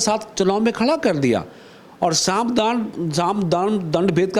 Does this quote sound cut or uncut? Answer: uncut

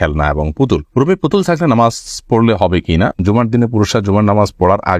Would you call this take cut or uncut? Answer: cut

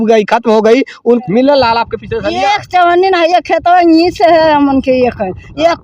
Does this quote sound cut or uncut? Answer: cut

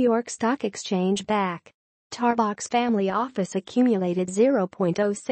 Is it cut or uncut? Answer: cut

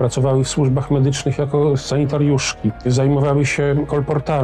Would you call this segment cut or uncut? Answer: cut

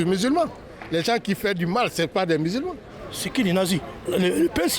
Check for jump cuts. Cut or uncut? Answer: cut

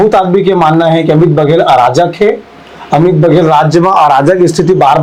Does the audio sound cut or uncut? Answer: uncut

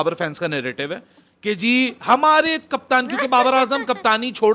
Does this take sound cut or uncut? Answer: uncut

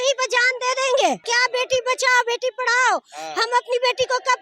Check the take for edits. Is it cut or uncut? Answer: cut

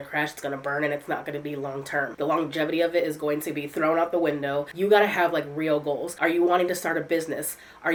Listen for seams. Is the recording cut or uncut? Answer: uncut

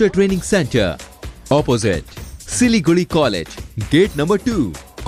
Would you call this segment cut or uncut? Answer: uncut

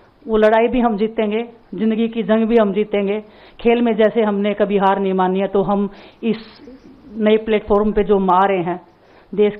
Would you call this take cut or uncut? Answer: uncut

